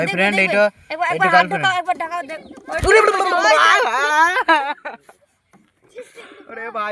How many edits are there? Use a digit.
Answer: 0